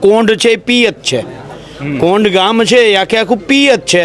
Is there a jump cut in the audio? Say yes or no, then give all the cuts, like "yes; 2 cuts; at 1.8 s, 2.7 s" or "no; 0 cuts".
no; 0 cuts